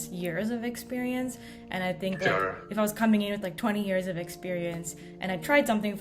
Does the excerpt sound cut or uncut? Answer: uncut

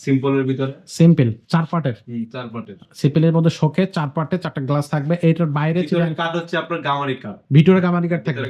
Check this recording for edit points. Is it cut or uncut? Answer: uncut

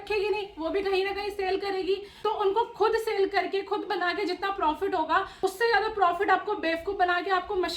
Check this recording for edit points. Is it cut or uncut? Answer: cut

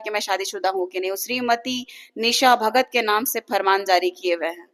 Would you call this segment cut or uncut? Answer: uncut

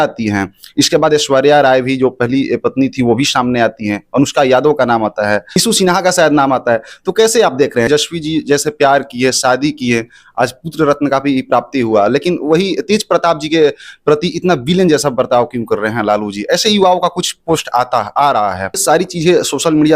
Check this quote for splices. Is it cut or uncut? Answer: cut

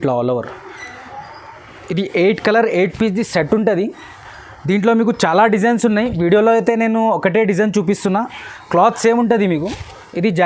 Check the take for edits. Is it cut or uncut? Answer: uncut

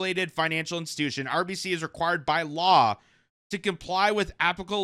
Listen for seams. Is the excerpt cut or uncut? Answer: uncut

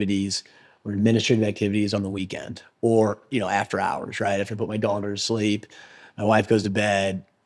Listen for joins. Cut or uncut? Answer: cut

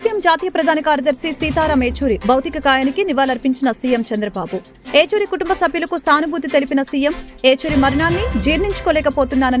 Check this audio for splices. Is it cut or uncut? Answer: uncut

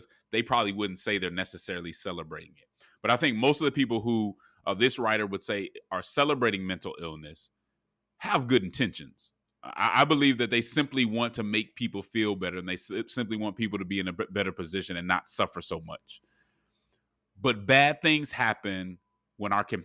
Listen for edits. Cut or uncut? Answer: uncut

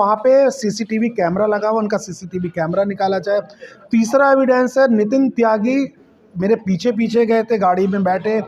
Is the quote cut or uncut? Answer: uncut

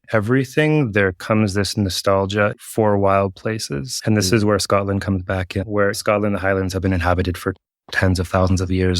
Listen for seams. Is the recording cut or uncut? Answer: cut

